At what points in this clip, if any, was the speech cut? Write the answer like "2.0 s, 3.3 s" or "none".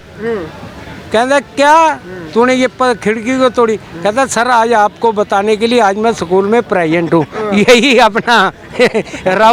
none